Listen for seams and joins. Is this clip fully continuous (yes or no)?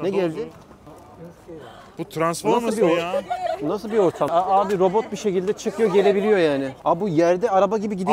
no